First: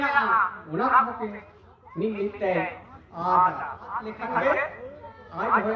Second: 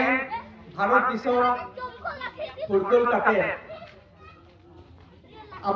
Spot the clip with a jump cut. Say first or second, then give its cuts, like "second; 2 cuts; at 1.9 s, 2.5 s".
first; 1 cut; at 4.1 s